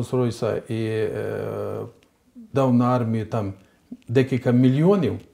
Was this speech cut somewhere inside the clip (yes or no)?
no